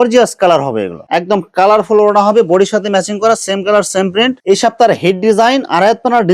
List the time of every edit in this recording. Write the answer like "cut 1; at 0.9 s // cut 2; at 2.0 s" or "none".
cut 1; at 1.0 s // cut 2; at 4.4 s